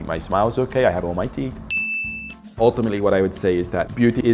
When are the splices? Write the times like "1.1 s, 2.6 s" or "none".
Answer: 2.6 s